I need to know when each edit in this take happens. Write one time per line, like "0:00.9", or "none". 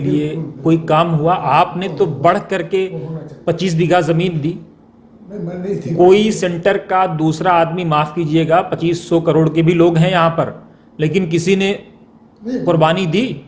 none